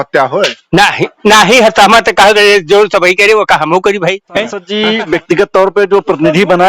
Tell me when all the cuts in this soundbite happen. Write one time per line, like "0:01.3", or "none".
0:04.6